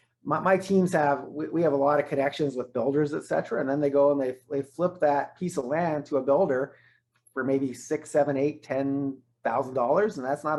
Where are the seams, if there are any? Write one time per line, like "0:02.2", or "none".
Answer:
none